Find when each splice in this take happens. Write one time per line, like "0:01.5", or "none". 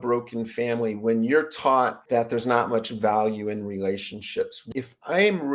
0:02.0
0:04.6